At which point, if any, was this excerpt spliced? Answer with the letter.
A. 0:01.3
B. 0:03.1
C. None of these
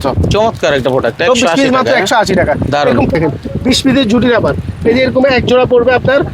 B